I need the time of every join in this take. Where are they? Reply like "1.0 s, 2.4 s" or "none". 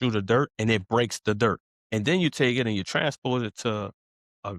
1.7 s